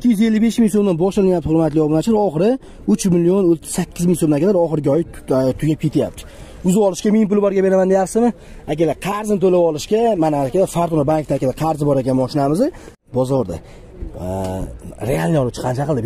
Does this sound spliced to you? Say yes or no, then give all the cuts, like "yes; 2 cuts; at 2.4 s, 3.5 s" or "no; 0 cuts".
yes; 1 cut; at 13.0 s